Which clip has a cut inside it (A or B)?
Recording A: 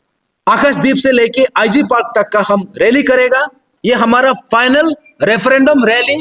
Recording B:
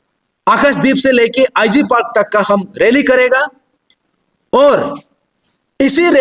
A